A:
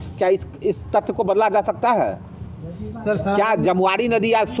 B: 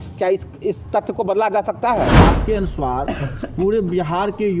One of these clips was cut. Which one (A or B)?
B